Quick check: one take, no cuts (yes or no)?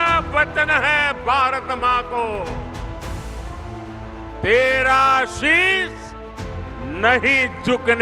yes